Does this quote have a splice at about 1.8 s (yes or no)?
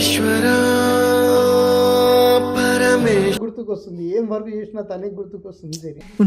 no